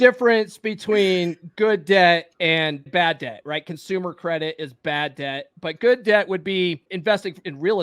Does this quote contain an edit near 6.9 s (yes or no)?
yes